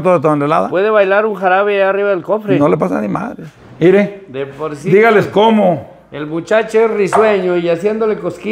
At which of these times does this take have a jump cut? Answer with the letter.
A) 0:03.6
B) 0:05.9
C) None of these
A